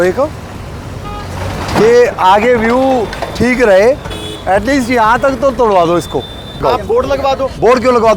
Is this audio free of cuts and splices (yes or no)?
no